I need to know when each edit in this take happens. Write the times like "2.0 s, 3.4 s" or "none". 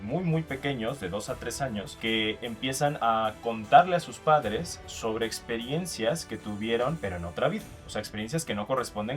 1.9 s, 3.0 s, 7.0 s